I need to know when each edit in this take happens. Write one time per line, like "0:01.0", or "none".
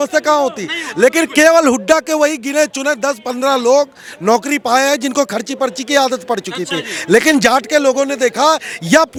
none